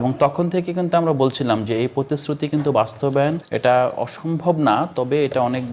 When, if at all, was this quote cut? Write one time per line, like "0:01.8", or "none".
0:03.5